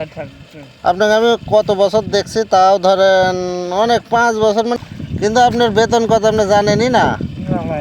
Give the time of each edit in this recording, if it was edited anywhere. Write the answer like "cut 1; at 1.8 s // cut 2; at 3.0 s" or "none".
cut 1; at 4.8 s

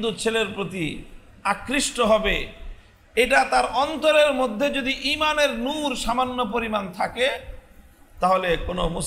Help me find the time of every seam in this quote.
none

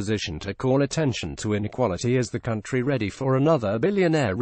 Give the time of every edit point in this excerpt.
cut 1; at 2.0 s

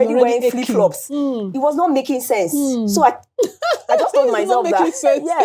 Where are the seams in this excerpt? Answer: none

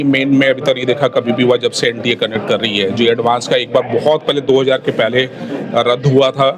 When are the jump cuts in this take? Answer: none

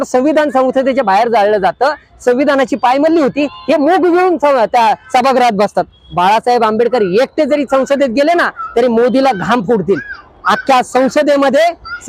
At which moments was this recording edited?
cut 1; at 6.0 s

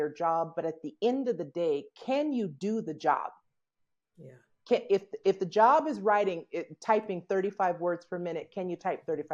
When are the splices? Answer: none

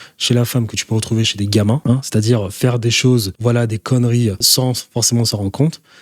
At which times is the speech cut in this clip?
cut 1; at 1.8 s // cut 2; at 3.3 s // cut 3; at 4.4 s

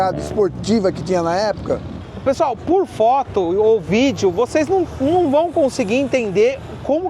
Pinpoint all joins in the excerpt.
cut 1; at 1.9 s

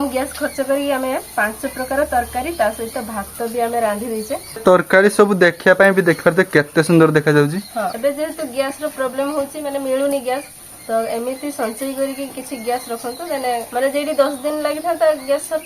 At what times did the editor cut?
cut 1; at 4.6 s // cut 2; at 7.8 s // cut 3; at 13.7 s

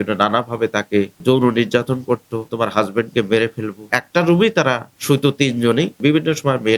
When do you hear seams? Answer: cut 1; at 1.2 s // cut 2; at 2.5 s // cut 3; at 3.8 s // cut 4; at 4.9 s // cut 5; at 6.0 s

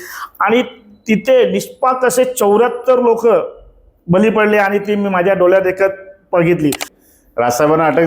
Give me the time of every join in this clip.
cut 1; at 6.9 s

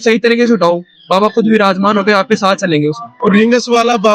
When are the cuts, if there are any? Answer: cut 1; at 3.1 s

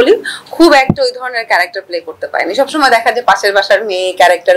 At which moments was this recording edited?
none

